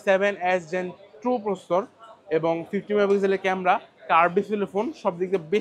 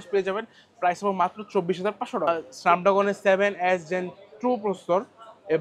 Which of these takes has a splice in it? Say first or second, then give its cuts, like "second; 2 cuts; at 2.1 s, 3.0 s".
second; 1 cut; at 2.3 s